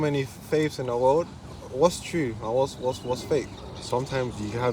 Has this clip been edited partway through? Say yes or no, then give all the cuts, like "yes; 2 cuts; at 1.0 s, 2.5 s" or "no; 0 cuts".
yes; 1 cut; at 3.5 s